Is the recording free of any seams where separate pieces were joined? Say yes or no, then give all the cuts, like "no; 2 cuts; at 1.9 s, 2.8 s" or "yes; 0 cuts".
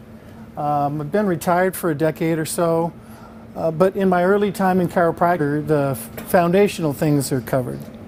yes; 0 cuts